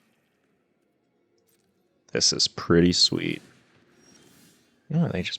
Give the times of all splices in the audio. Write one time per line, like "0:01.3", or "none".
0:03.6